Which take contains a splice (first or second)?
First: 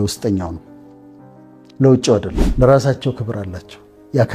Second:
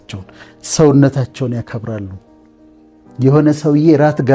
first